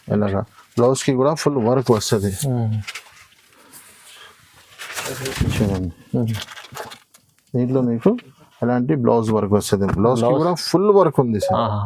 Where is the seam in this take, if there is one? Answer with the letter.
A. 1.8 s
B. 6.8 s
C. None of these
C